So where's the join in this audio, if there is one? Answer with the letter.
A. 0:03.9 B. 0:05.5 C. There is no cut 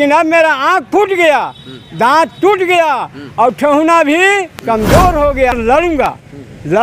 B